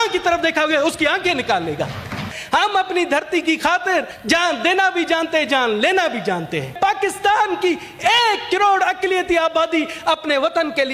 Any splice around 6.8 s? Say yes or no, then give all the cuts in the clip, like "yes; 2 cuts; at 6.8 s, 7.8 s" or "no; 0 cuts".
yes; 3 cuts; at 2.3 s, 4.1 s, 6.8 s